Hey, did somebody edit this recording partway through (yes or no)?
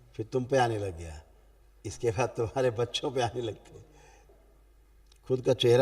yes